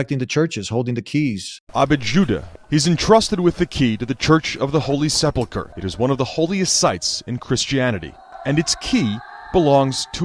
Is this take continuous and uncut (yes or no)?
yes